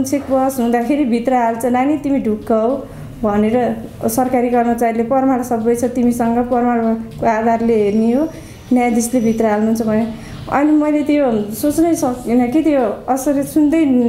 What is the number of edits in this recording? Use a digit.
0